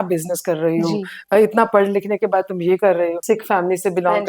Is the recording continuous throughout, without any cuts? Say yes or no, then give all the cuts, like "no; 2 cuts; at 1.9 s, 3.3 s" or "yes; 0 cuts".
no; 1 cut; at 3.2 s